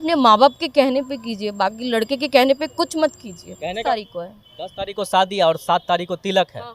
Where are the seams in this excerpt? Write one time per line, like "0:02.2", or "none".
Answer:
0:03.8